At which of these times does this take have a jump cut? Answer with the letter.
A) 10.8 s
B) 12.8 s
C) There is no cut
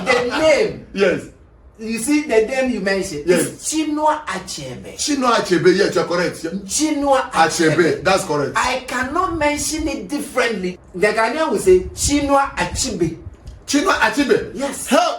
A